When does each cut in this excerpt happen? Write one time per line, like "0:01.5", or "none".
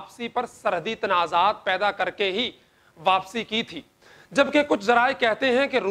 none